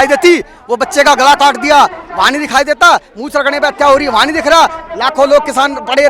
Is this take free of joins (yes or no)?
yes